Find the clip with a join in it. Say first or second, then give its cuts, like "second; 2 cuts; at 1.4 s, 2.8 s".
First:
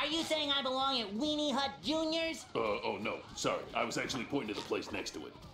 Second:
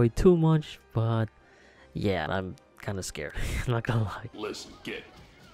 second; 2 cuts; at 2.3 s, 4.3 s